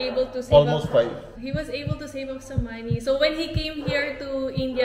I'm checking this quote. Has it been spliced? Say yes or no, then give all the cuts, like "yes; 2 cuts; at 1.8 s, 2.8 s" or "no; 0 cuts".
yes; 1 cut; at 1.3 s